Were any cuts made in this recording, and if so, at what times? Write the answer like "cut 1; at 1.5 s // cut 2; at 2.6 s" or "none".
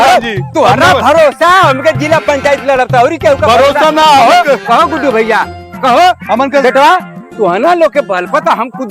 none